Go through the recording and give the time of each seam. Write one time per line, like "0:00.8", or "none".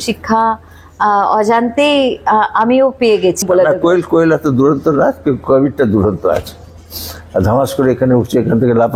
0:03.4

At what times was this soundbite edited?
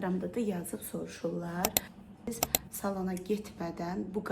0:02.2

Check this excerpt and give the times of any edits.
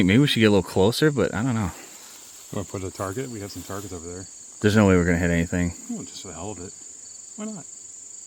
none

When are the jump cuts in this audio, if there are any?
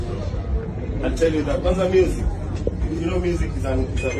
none

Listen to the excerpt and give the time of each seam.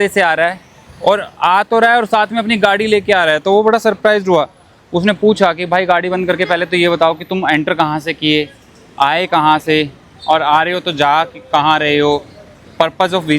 none

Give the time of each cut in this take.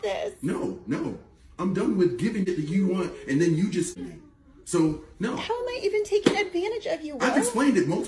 0:02.4
0:04.0

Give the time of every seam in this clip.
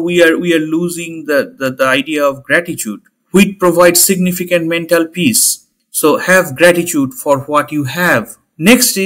none

